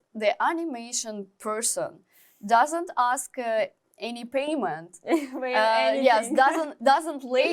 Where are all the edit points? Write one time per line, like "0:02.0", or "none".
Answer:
none